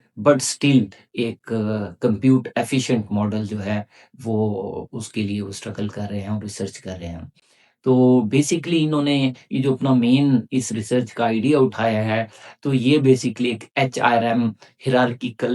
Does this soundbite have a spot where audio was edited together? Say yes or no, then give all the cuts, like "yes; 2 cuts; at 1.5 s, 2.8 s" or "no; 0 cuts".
no; 0 cuts